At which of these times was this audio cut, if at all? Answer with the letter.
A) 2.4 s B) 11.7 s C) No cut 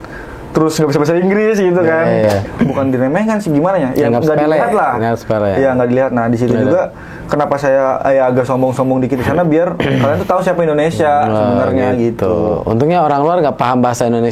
A